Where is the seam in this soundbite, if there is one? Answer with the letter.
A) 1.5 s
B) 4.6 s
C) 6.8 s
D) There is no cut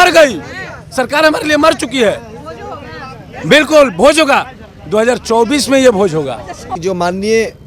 C